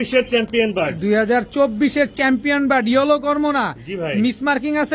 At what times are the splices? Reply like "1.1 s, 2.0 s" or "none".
none